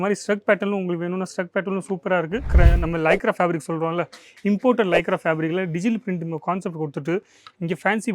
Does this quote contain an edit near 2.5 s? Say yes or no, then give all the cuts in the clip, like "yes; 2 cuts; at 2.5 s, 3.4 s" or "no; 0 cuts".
yes; 1 cut; at 2.5 s